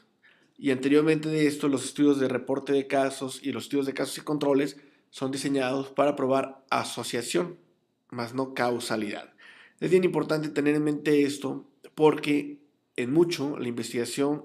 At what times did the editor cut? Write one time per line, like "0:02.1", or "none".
0:05.6